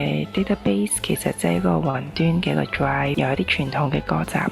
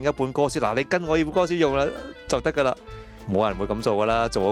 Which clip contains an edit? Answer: first; 1 cut; at 3.1 s

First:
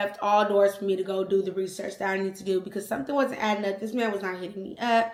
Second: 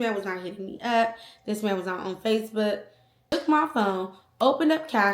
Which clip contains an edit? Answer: second; 1 cut; at 3.3 s

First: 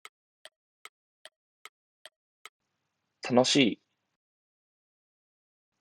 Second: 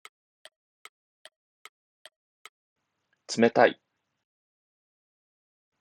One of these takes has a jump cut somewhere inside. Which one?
first; 1 cut; at 2.5 s

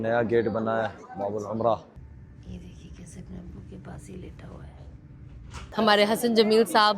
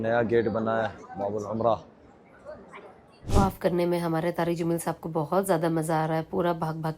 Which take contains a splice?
first; 2 cuts; at 2.0 s, 5.6 s

